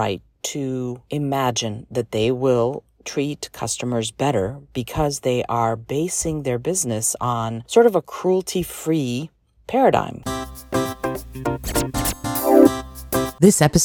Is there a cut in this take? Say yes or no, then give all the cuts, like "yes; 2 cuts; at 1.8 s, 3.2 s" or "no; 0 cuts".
yes; 3 cuts; at 1.0 s, 7.6 s, 10.2 s